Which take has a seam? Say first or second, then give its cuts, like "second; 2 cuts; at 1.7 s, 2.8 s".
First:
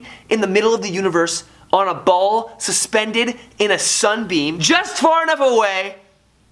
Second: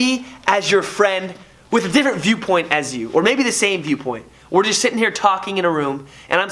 first; 1 cut; at 4.6 s